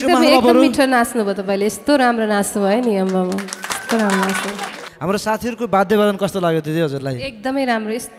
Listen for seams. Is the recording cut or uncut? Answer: cut